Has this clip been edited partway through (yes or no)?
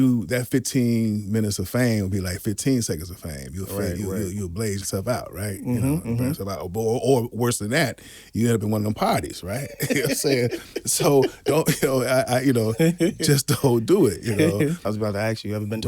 yes